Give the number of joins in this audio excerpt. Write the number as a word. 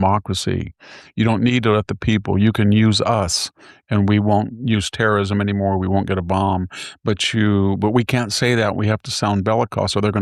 zero